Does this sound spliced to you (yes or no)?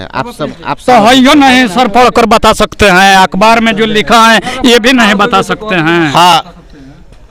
no